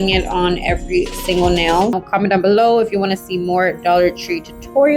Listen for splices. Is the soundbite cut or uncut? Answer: cut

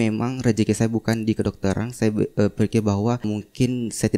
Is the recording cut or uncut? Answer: uncut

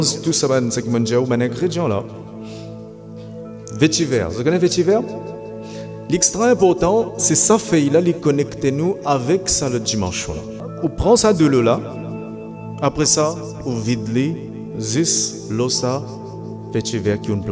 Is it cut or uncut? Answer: cut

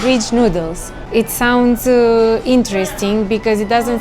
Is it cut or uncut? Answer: uncut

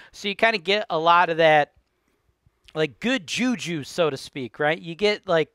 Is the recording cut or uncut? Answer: uncut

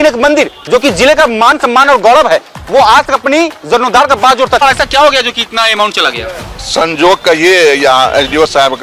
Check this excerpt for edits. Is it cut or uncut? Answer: cut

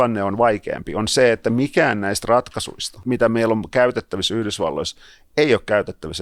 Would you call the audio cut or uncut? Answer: cut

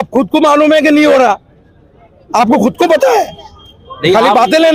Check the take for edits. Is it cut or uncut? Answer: uncut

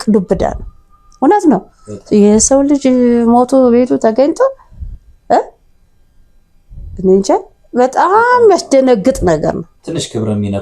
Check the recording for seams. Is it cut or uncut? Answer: cut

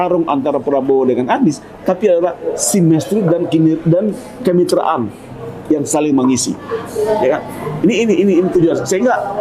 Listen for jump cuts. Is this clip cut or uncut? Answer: uncut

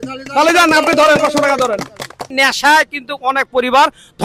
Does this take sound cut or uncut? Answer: cut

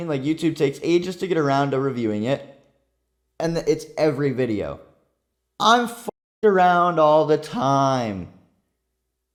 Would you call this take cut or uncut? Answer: uncut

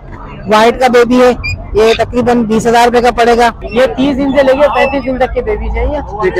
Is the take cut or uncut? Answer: cut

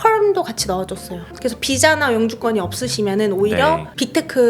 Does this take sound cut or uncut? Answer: cut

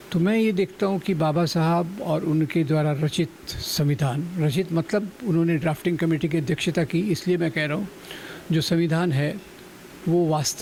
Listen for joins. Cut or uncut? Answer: uncut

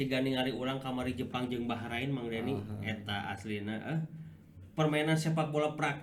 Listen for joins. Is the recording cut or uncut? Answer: uncut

